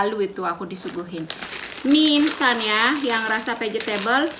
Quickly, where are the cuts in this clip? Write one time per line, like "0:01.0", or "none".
0:01.4